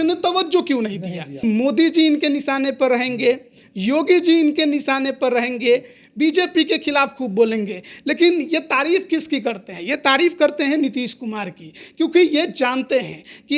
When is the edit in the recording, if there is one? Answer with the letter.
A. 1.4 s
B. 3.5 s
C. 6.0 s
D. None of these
A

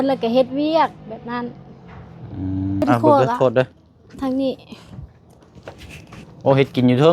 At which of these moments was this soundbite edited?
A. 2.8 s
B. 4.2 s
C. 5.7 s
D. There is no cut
A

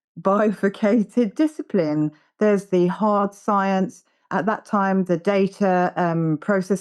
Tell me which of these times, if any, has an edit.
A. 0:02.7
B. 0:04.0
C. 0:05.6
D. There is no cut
D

